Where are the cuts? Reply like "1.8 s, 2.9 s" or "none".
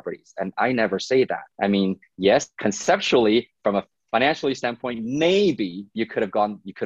1.4 s, 2.5 s